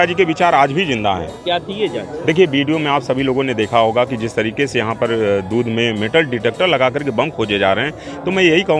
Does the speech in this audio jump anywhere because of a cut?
yes; 1 cut; at 1.3 s

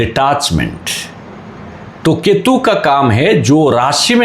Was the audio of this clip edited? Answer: no; 0 cuts

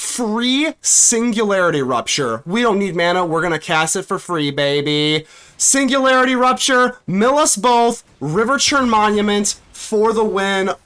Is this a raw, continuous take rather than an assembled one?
yes; 0 cuts

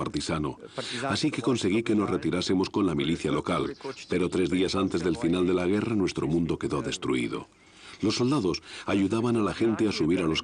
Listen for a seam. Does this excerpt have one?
yes; 1 cut; at 5.0 s

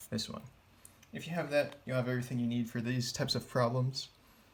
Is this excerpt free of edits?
yes; 0 cuts

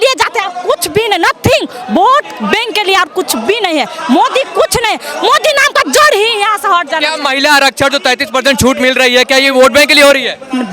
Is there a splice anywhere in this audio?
no; 0 cuts

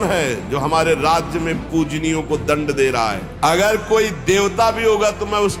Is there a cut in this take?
yes; 1 cut; at 3.2 s

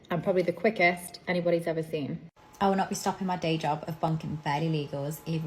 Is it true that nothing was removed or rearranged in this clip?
no; 1 cut; at 2.2 s

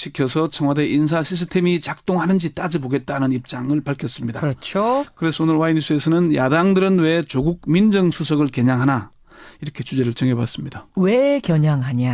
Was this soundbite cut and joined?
no; 0 cuts

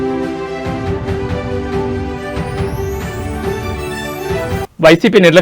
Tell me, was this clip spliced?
yes; 1 cut; at 1.8 s

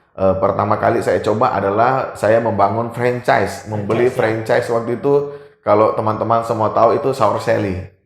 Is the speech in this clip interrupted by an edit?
no; 0 cuts

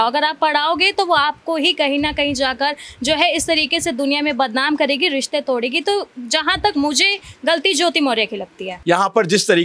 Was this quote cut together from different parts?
yes; 1 cut; at 8.7 s

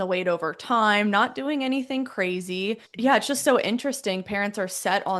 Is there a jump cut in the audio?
yes; 1 cut; at 2.9 s

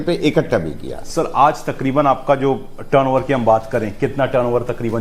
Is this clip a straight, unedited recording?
no; 1 cut; at 1.1 s

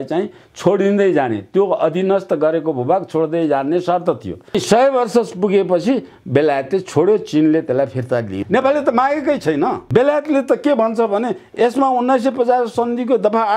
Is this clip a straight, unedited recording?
no; 3 cuts; at 4.5 s, 8.4 s, 9.9 s

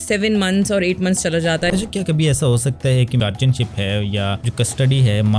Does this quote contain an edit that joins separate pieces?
yes; 3 cuts; at 1.7 s, 3.2 s, 4.4 s

